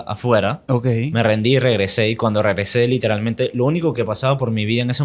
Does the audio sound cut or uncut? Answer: uncut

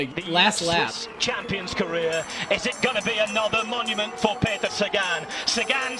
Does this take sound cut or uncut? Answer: cut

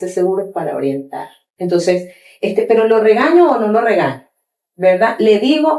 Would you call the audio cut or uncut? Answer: uncut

